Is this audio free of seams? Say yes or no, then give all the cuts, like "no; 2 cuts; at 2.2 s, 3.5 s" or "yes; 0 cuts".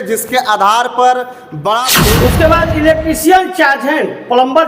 no; 1 cut; at 1.9 s